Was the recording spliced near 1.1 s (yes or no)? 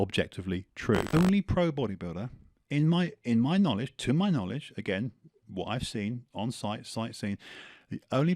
yes